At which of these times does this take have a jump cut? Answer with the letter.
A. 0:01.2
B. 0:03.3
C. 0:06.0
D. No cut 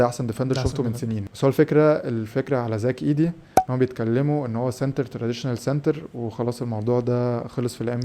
A